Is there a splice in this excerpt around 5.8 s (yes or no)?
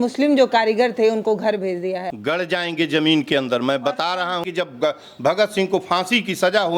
no